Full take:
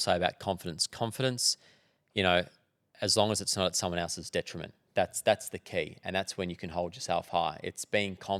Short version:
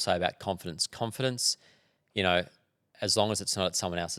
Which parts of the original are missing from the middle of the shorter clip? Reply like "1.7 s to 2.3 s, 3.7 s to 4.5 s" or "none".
none